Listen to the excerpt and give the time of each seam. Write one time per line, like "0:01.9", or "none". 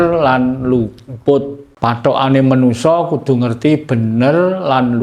0:01.6